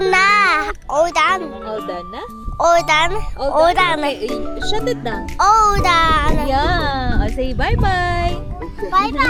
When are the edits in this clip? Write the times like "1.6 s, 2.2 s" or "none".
none